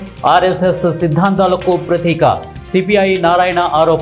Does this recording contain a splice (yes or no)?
no